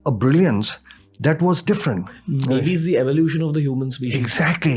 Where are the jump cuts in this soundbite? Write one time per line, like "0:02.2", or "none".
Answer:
none

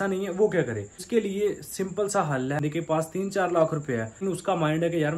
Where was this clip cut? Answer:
0:00.9
0:02.6
0:04.2

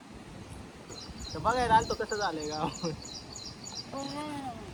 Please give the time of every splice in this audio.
none

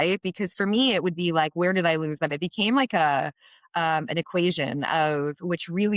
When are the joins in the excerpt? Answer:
none

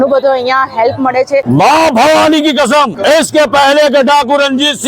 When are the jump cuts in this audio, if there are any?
0:01.4
0:02.9

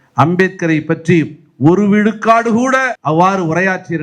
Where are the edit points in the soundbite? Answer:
0:02.9

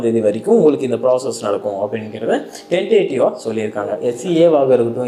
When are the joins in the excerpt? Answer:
0:04.2

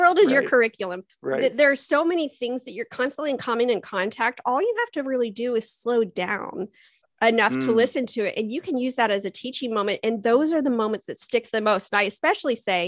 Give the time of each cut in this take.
none

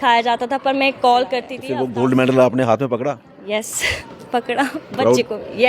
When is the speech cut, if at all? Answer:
0:01.6

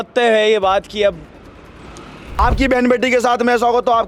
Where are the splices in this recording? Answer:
0:02.4

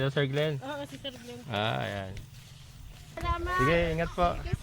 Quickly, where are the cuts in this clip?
0:03.2

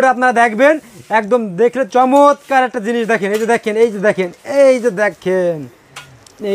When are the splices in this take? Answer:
none

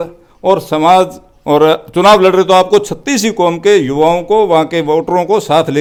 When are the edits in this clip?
none

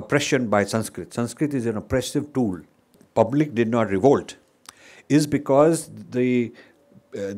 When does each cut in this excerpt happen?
0:03.0

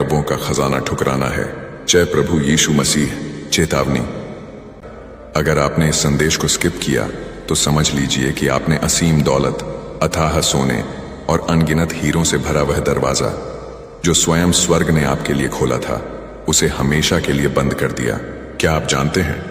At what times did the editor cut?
0:04.7

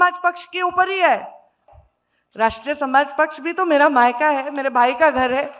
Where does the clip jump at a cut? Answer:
0:01.6

